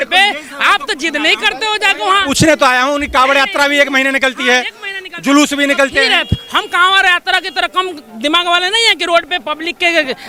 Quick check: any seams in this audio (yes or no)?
no